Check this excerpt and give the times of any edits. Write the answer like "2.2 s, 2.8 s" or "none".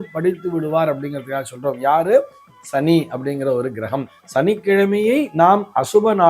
4.2 s